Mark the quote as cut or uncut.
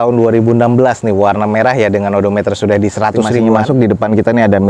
cut